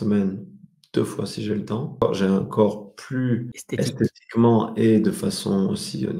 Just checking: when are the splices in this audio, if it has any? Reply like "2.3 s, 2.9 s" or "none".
2.0 s, 3.6 s